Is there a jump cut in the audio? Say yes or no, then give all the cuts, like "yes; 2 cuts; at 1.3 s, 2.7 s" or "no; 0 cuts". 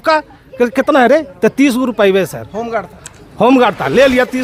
no; 0 cuts